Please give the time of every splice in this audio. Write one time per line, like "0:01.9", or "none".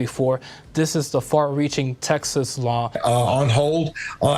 0:02.9